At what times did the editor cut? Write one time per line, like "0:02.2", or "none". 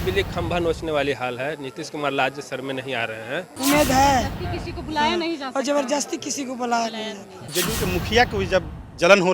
0:03.5
0:07.5